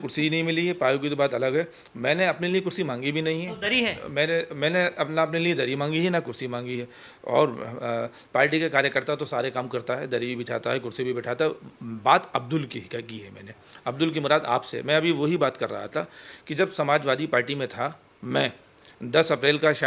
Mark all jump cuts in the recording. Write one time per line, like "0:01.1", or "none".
none